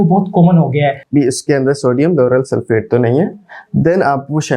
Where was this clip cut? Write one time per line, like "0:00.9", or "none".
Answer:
0:01.0